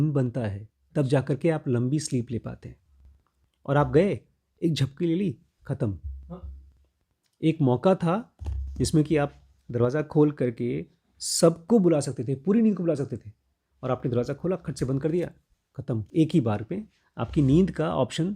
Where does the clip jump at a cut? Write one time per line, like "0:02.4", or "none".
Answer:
0:16.1